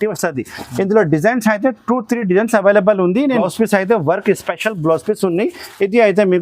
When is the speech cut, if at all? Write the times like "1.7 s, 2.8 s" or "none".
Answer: 3.4 s

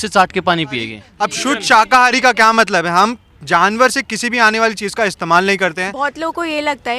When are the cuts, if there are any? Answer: 1.0 s, 5.9 s

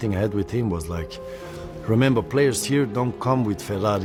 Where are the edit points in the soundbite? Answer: none

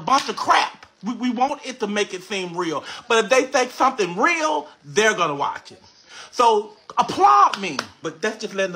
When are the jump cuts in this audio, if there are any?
2.9 s, 8.0 s

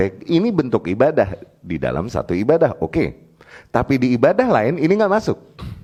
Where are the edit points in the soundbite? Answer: none

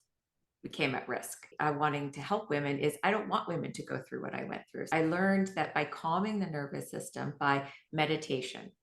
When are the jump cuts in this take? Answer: 1.5 s, 4.7 s

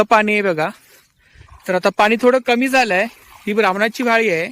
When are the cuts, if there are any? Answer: none

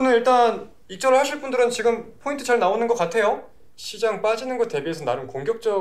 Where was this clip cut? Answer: 3.6 s

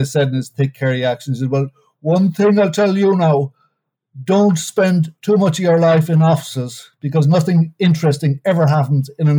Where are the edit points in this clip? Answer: none

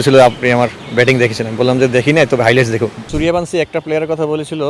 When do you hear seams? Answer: 3.0 s

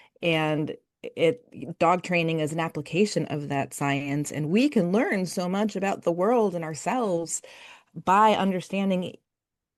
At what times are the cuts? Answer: none

